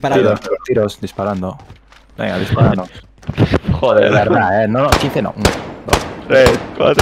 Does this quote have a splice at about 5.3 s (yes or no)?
no